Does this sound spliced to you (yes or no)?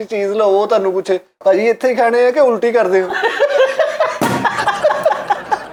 no